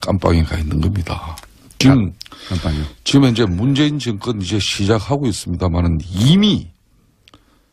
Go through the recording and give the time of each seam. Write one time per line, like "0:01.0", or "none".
0:06.5